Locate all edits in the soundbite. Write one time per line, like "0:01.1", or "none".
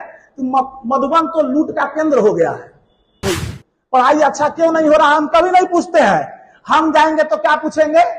0:03.3